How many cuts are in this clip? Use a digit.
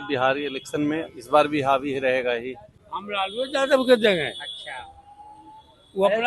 1